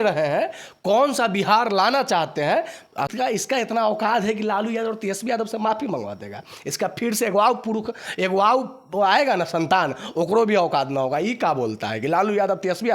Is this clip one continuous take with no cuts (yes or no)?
no